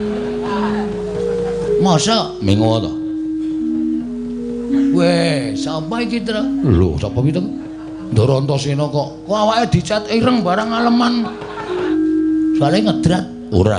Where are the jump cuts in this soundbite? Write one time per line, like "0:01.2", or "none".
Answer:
0:11.9